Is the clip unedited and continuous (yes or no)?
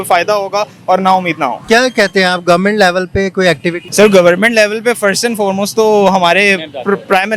no